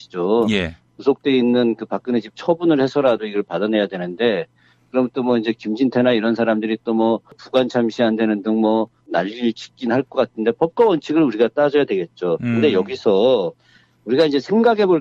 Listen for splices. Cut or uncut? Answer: uncut